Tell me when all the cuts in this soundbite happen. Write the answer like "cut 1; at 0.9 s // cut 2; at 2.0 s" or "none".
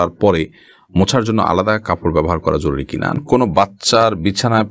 cut 1; at 3.2 s